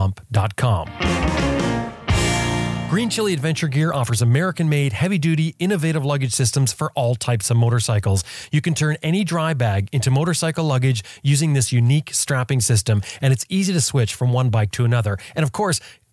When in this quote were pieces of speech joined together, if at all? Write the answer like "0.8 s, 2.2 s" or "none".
0.9 s, 2.8 s